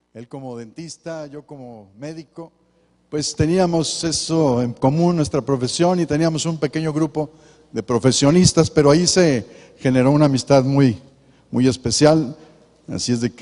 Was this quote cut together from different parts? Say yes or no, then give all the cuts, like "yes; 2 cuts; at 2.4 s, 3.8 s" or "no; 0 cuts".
yes; 1 cut; at 8.3 s